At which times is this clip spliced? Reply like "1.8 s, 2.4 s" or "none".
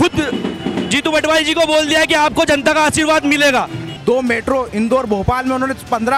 3.9 s